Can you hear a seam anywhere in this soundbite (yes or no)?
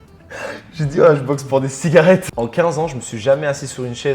yes